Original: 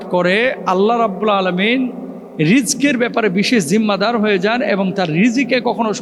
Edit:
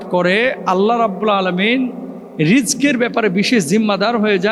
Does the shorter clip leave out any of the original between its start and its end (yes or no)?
no